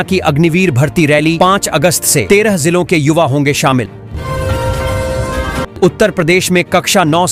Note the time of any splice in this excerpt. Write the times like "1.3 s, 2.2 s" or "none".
none